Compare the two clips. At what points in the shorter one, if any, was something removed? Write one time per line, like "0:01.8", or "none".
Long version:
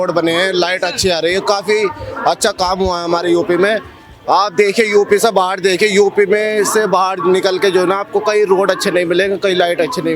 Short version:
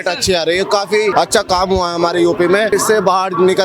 0:01.1
0:02.7